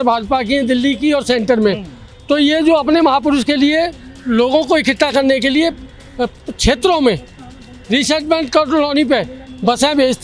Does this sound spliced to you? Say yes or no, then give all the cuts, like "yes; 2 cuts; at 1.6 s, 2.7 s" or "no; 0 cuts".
no; 0 cuts